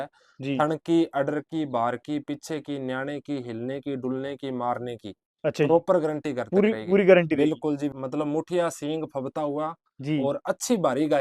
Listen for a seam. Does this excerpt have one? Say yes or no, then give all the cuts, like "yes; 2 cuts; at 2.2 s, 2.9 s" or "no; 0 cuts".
yes; 1 cut; at 8.0 s